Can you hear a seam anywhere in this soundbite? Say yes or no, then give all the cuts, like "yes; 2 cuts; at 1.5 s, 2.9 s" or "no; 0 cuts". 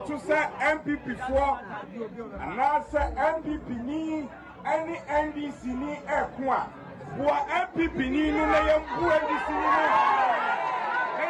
no; 0 cuts